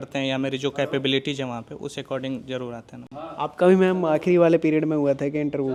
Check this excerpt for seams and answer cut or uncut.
uncut